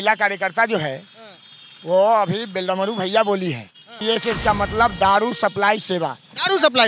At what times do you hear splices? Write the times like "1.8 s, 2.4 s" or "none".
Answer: 3.9 s